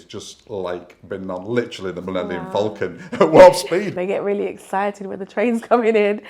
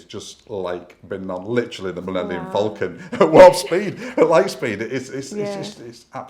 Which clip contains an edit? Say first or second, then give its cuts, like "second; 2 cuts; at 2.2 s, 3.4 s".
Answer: first; 1 cut; at 3.9 s